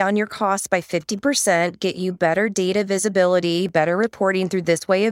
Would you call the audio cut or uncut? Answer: uncut